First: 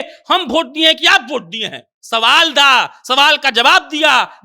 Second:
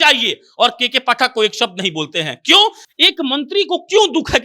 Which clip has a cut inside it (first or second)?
second